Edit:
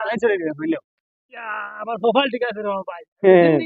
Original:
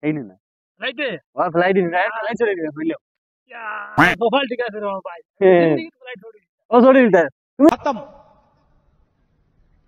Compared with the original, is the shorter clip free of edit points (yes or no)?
yes